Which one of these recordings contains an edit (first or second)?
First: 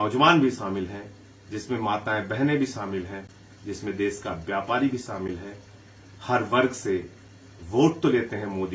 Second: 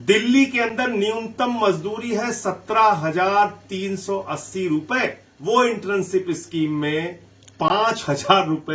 second